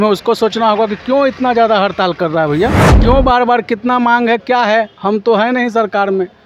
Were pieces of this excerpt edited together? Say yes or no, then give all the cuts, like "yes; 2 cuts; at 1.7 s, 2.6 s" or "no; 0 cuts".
yes; 1 cut; at 2.9 s